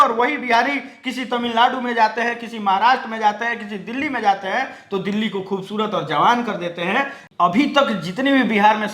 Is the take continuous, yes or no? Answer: no